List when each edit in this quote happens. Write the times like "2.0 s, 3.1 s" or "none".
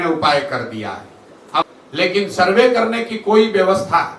1.6 s